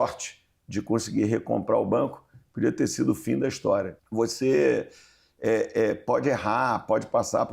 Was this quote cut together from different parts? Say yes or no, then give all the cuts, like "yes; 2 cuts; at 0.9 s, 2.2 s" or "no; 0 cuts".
yes; 1 cut; at 4.0 s